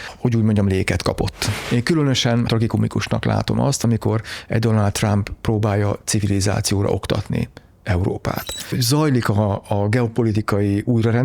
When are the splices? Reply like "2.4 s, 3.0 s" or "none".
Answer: 1.5 s, 2.5 s, 8.6 s